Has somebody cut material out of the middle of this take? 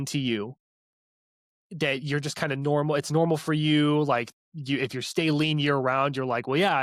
no; 0 cuts

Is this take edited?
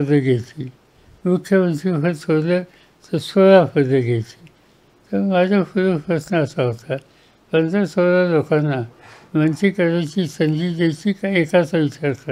no; 0 cuts

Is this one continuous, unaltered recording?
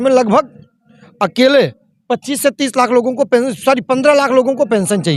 yes; 0 cuts

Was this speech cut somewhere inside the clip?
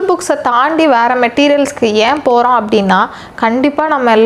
no; 0 cuts

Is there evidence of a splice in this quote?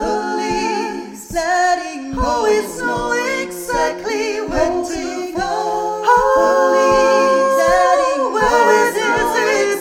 no; 0 cuts

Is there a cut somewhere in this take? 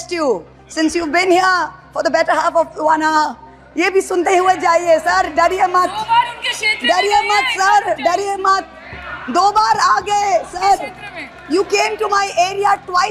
no; 0 cuts

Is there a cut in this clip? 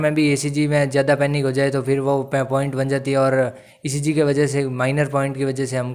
no; 0 cuts

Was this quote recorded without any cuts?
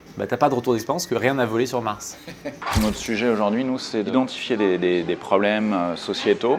no; 2 cuts; at 2.6 s, 4.1 s

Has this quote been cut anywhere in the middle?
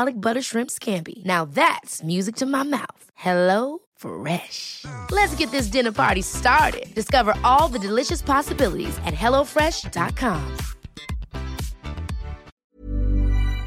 yes; 1 cut; at 12.5 s

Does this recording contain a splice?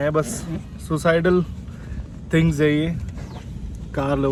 no; 0 cuts

